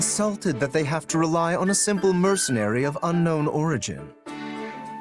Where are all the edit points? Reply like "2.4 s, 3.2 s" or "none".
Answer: 4.1 s